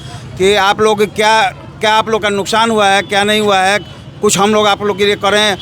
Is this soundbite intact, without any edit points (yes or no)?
yes